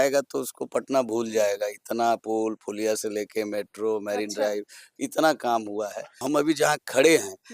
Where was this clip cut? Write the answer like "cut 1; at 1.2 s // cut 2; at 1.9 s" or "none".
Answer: cut 1; at 6.2 s

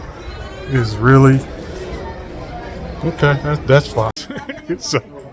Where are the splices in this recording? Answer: cut 1; at 4.2 s

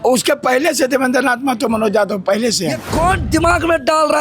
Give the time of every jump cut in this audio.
cut 1; at 2.8 s

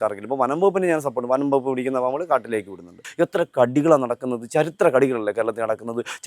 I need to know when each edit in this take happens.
cut 1; at 3.1 s

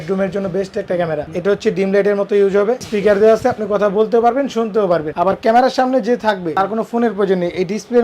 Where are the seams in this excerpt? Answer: cut 1; at 1.3 s // cut 2; at 2.8 s // cut 3; at 5.1 s // cut 4; at 6.5 s

